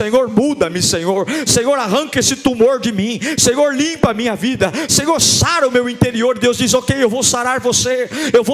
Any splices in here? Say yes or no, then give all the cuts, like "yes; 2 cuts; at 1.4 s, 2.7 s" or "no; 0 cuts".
no; 0 cuts